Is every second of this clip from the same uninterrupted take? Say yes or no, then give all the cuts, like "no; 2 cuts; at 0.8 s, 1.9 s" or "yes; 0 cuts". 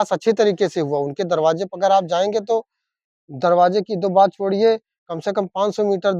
yes; 0 cuts